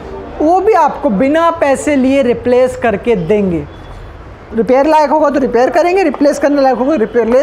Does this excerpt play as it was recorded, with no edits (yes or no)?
yes